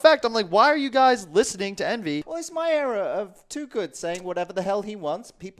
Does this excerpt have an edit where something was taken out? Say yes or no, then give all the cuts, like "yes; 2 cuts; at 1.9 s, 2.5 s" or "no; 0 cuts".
yes; 1 cut; at 2.3 s